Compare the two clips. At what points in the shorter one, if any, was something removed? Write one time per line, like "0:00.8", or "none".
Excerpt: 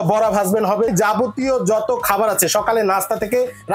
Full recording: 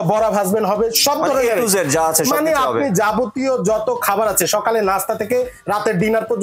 0:00.9